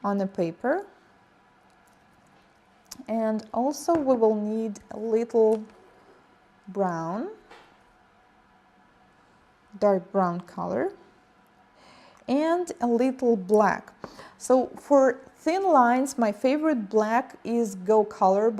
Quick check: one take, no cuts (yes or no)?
no